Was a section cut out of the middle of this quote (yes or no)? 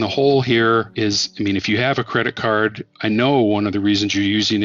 yes